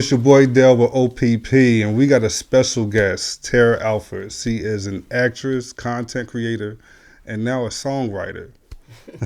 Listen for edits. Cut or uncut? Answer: uncut